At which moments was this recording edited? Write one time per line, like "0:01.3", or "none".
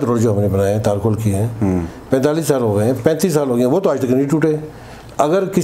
none

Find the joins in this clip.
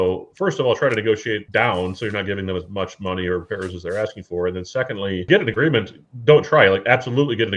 0:05.3

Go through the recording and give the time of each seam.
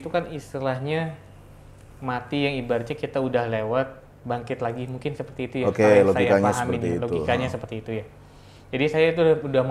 none

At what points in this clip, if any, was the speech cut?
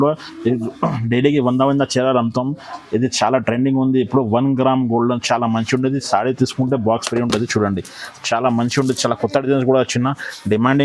none

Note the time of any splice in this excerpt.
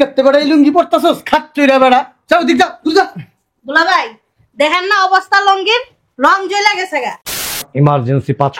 0:07.6

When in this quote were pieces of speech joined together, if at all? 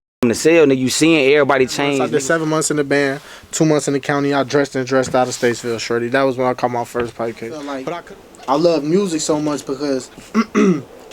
0:02.1
0:07.8

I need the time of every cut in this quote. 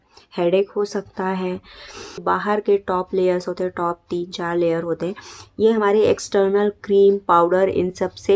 0:02.2

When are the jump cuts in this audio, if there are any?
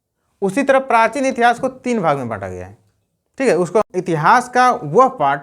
0:03.9

